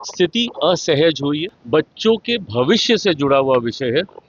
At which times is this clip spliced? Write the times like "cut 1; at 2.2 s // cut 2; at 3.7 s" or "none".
cut 1; at 1.5 s